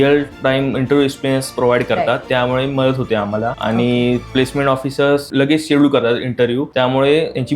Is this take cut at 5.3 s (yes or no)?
yes